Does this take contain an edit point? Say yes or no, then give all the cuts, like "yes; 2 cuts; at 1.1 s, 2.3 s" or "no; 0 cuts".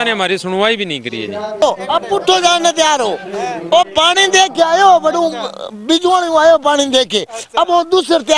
yes; 1 cut; at 1.7 s